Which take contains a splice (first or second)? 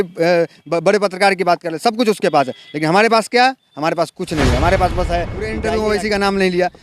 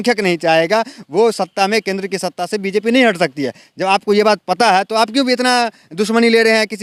first